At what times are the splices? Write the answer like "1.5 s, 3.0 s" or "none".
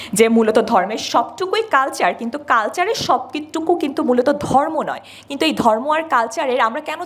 none